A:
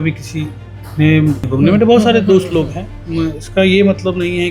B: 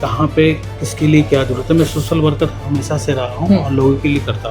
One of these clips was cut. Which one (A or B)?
A